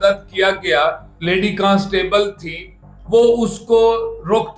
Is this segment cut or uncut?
cut